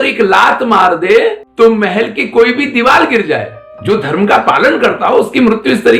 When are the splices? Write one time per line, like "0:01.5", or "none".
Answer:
0:03.7